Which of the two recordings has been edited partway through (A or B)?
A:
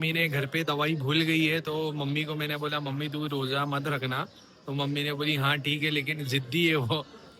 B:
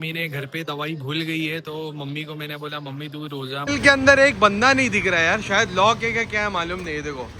B